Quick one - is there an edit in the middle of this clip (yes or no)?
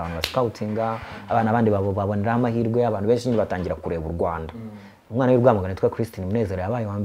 no